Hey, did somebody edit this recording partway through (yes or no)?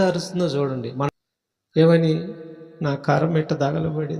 yes